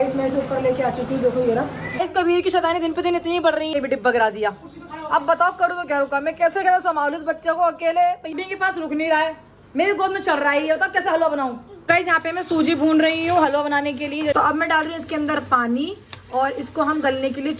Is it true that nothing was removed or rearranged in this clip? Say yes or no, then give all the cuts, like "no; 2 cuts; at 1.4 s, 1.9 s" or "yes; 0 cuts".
no; 5 cuts; at 1.8 s, 3.7 s, 8.4 s, 11.7 s, 14.3 s